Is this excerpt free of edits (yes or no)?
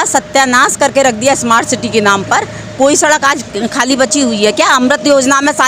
yes